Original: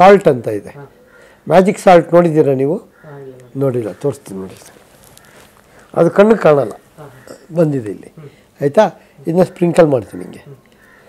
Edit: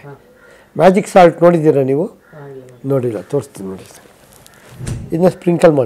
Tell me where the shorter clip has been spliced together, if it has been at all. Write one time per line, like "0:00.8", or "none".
0:04.9